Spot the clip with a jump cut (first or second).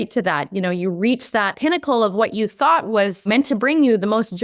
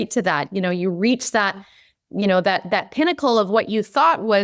first